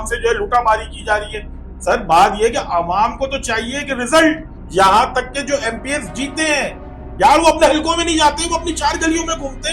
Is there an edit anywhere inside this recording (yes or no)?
yes